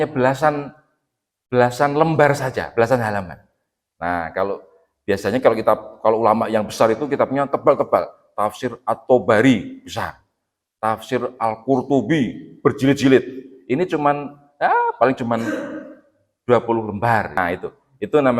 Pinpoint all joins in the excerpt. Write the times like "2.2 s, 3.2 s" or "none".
17.4 s